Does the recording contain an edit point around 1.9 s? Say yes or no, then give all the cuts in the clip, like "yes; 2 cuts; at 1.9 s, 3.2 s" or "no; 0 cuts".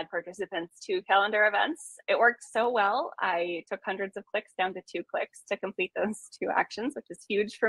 yes; 1 cut; at 1.9 s